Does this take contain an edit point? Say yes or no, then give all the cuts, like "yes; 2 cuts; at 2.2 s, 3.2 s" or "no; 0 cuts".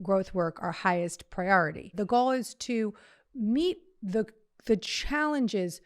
yes; 1 cut; at 1.9 s